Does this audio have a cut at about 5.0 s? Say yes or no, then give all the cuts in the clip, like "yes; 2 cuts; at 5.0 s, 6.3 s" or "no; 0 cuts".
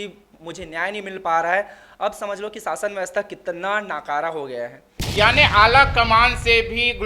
yes; 1 cut; at 5.0 s